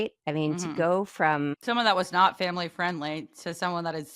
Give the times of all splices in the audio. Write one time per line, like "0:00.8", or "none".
0:01.6